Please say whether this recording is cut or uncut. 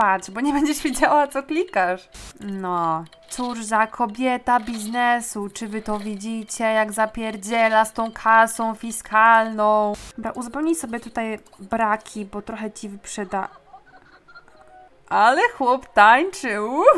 cut